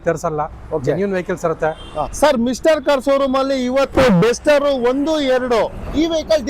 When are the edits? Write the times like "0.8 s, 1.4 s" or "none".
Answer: 2.0 s